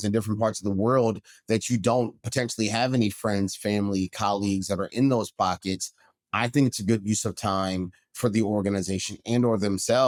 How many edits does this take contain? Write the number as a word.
zero